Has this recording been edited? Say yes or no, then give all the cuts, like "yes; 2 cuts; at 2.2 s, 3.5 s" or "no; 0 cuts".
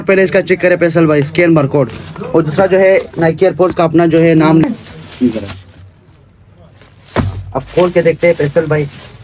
yes; 1 cut; at 4.6 s